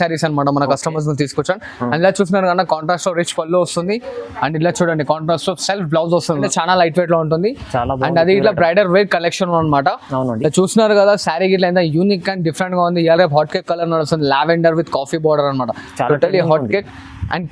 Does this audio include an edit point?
yes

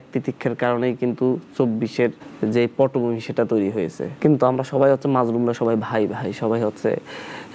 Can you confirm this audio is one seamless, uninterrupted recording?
no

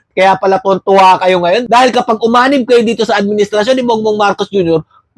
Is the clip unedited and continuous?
yes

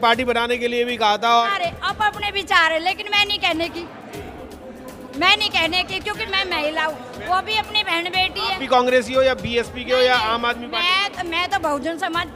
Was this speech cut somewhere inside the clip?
yes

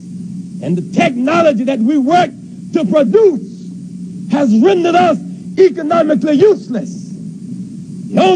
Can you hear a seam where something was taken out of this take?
no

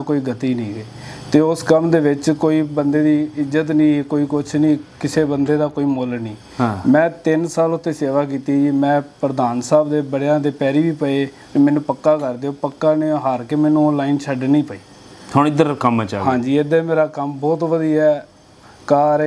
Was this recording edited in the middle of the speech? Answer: no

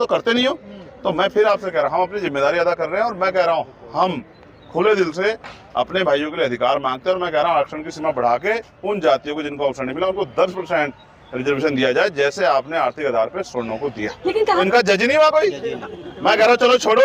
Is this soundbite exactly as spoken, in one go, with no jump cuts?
no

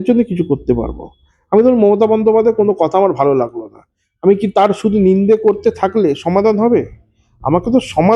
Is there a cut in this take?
no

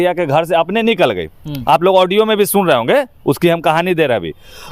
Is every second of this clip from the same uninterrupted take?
yes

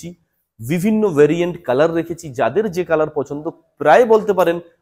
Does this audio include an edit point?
no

